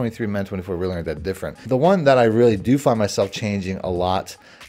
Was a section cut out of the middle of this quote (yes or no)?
yes